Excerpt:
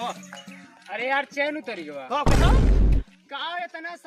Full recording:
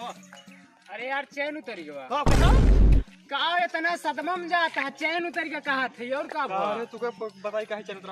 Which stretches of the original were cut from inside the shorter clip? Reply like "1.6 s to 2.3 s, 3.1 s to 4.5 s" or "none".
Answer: none